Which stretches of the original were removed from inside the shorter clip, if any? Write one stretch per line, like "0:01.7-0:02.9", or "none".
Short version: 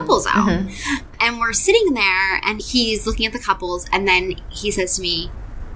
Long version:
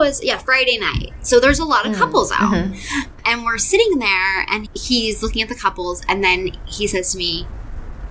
0:04.7-0:04.8